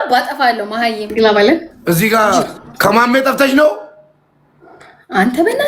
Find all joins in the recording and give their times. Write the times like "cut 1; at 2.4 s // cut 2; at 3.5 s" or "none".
cut 1; at 1.0 s // cut 2; at 1.7 s // cut 3; at 2.6 s